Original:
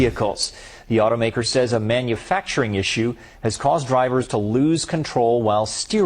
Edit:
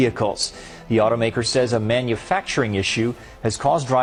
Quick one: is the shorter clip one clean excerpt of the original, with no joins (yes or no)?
yes